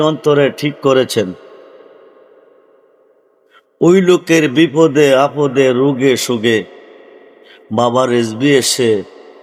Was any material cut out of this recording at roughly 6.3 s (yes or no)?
no